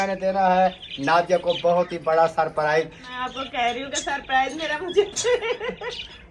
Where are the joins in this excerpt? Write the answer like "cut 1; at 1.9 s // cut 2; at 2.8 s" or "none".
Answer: cut 1; at 3.0 s